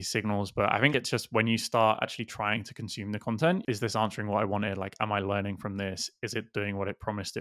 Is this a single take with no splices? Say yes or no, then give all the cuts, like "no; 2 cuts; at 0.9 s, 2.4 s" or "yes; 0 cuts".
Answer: no; 2 cuts; at 0.9 s, 3.6 s